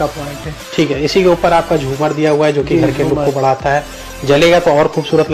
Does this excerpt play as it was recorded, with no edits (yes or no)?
yes